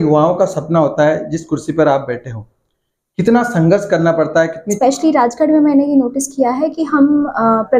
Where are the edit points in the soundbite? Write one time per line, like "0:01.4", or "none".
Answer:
0:04.6